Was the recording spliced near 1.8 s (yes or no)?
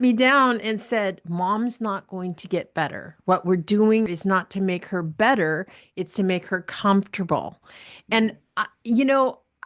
no